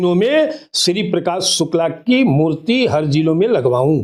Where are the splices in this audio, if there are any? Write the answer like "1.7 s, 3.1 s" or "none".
none